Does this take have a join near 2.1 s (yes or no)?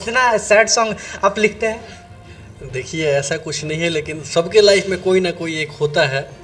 no